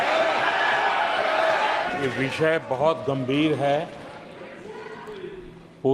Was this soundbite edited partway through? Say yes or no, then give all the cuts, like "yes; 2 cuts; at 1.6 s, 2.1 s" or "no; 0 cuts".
yes; 1 cut; at 1.9 s